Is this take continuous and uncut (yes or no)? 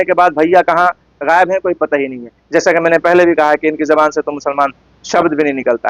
yes